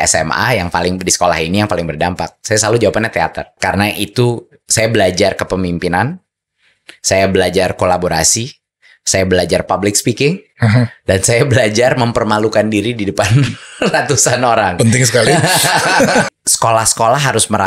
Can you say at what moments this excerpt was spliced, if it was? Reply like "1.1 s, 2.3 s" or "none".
16.3 s

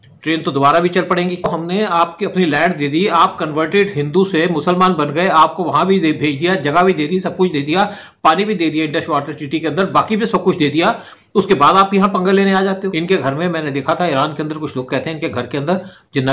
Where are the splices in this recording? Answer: 1.5 s, 12.9 s

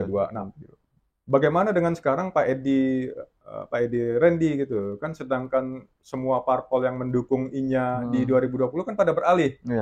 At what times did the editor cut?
none

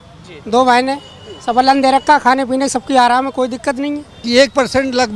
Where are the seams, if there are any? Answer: 4.1 s

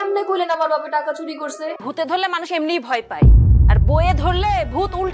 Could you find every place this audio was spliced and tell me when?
1.8 s

